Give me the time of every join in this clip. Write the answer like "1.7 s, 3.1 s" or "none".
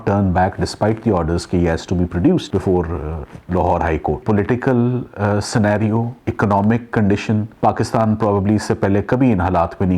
4.2 s, 6.2 s, 7.5 s